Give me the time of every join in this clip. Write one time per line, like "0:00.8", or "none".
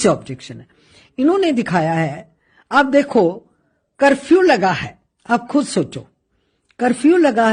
none